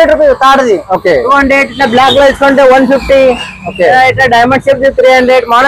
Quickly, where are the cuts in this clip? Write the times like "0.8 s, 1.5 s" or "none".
none